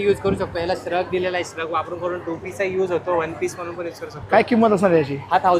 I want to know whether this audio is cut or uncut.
uncut